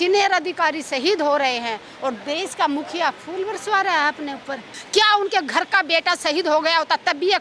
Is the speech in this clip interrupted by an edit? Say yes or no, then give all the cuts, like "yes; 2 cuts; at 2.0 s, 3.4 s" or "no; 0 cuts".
yes; 1 cut; at 4.7 s